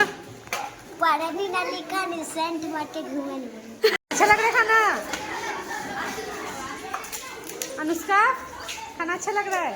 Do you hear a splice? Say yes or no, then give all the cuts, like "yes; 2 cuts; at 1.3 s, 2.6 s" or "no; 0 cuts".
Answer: yes; 1 cut; at 4.0 s